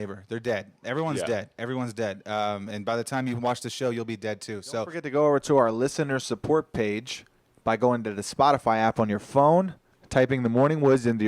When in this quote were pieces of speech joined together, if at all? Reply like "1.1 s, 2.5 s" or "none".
4.9 s

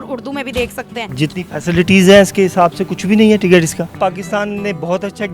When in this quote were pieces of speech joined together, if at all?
1.0 s, 4.0 s

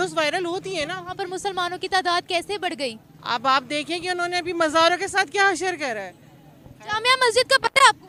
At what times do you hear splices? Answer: none

